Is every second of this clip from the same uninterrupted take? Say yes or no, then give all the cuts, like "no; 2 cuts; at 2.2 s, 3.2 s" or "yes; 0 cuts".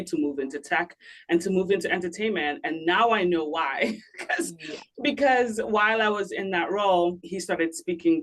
no; 1 cut; at 7.3 s